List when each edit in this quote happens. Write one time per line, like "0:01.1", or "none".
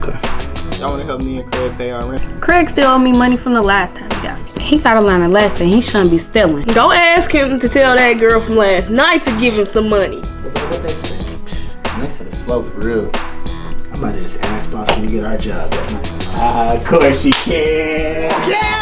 none